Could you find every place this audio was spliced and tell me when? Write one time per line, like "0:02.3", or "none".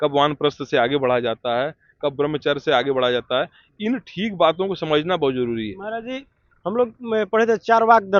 none